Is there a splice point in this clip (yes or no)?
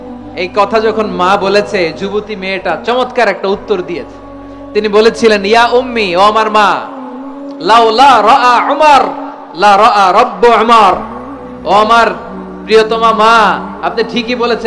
no